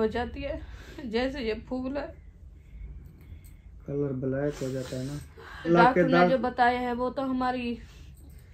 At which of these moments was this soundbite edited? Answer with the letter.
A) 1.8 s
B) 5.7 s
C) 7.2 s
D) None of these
B